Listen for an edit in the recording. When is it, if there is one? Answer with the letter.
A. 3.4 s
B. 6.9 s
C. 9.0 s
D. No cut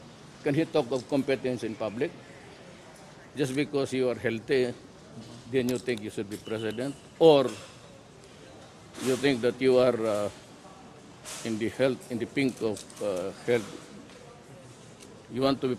A